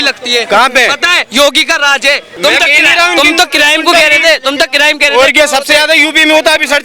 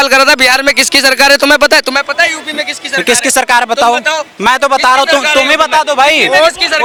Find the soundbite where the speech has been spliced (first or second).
first